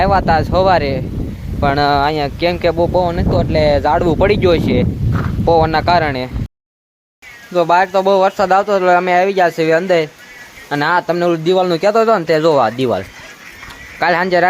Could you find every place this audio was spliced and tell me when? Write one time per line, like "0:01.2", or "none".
0:06.6